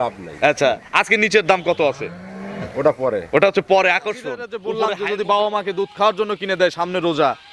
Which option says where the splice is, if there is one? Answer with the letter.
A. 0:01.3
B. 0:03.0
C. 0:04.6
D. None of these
C